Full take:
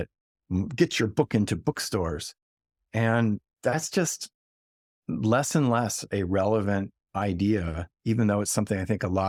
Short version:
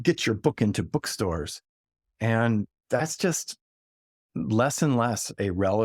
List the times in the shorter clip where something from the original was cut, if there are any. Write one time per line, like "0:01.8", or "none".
none